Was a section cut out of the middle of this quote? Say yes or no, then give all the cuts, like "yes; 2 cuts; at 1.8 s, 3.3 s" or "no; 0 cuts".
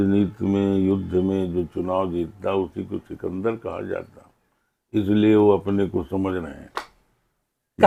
no; 0 cuts